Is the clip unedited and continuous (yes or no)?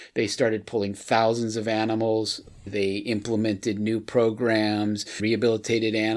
no